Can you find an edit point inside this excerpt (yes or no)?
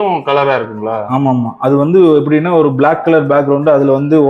no